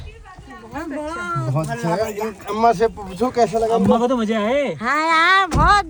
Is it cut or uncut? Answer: uncut